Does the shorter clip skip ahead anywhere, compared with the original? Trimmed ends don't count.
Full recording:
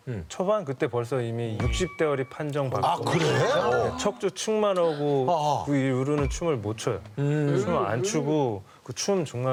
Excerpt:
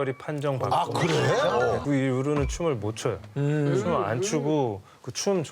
yes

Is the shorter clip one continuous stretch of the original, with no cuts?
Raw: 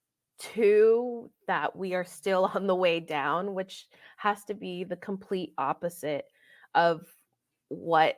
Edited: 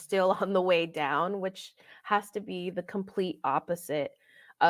yes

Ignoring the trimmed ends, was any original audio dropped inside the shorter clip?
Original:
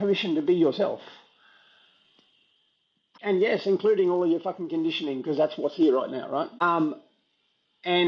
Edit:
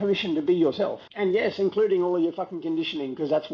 yes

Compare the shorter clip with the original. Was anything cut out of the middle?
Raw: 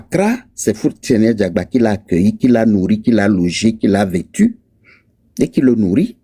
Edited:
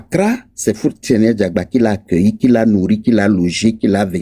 no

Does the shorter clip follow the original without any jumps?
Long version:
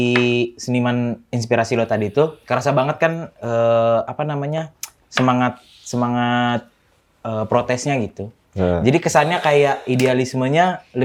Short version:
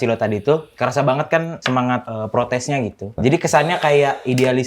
no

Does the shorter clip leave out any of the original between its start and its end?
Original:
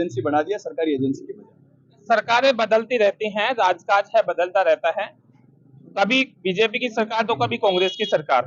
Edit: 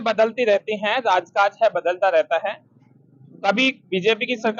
no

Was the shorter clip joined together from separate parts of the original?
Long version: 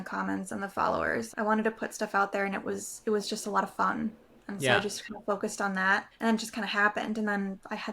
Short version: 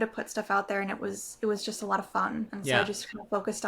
yes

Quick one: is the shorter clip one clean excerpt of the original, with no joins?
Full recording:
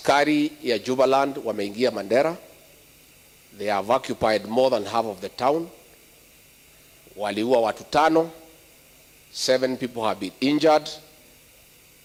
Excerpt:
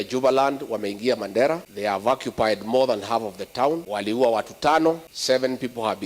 no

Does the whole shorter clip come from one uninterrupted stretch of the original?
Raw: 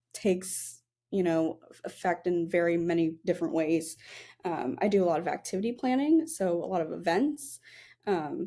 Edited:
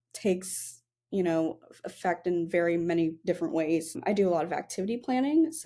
no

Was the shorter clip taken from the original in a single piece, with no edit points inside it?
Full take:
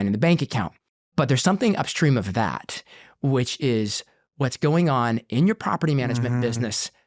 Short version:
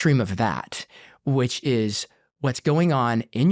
yes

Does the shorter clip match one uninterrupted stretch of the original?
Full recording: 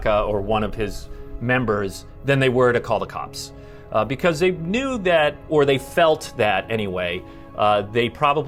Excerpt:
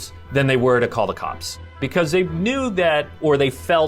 no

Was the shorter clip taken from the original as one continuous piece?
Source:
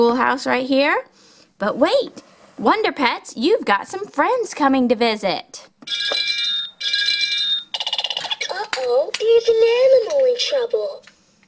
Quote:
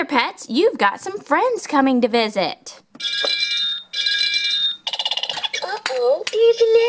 yes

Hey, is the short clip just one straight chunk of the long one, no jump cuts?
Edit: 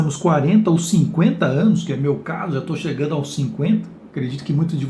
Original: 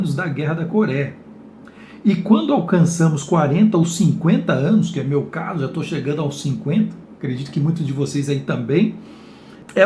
yes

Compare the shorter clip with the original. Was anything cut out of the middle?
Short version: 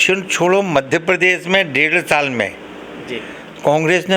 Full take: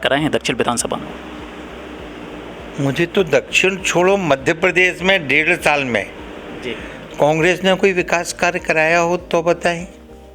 no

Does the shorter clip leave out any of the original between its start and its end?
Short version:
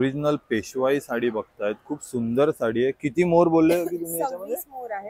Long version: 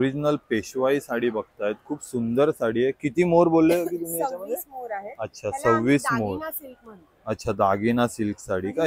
no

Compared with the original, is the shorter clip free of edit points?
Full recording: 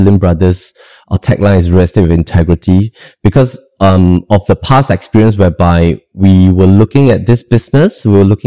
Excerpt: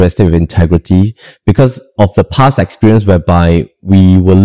no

